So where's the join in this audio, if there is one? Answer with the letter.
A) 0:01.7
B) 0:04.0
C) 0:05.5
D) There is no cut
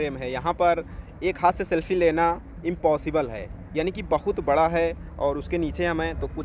D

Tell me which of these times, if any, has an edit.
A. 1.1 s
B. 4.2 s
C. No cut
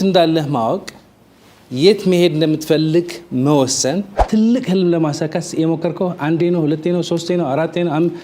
B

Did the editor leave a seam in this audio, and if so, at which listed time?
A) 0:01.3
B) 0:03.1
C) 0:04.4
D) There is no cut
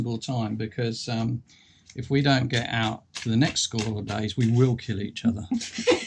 D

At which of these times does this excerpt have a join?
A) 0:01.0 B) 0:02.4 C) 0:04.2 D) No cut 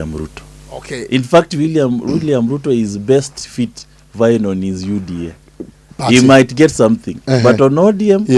A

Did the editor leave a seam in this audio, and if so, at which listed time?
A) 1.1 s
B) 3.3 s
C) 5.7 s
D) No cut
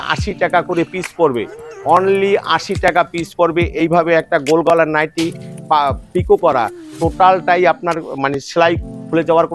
D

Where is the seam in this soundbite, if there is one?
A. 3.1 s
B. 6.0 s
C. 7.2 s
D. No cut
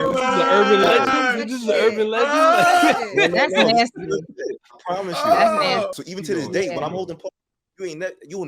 B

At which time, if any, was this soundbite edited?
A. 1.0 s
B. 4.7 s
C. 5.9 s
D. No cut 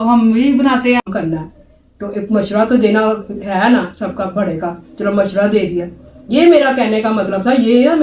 A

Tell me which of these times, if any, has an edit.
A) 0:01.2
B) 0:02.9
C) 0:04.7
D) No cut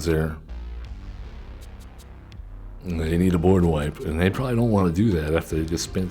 B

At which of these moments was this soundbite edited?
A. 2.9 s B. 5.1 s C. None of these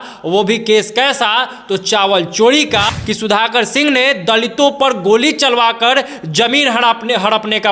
A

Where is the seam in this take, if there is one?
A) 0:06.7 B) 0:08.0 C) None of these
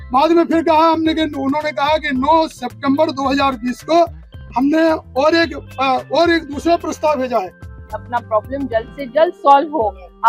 B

